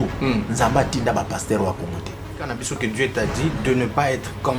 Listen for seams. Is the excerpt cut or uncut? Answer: cut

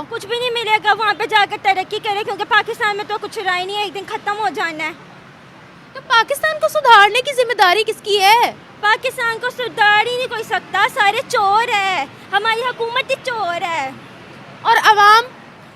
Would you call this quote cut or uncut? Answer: uncut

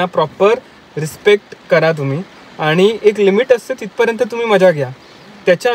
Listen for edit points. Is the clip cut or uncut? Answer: uncut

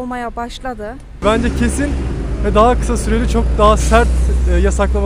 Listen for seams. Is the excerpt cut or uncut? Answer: cut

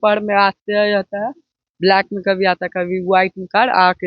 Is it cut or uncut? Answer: uncut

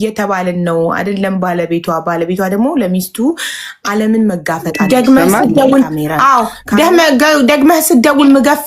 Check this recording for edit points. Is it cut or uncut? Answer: cut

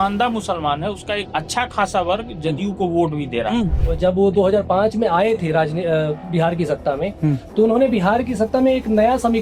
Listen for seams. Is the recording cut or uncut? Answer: cut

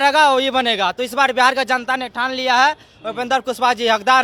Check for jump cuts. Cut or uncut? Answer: uncut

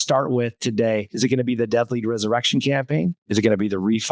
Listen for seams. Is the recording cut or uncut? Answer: cut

